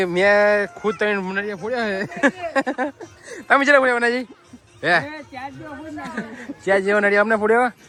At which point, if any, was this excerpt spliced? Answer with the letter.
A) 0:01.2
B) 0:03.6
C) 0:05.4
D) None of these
D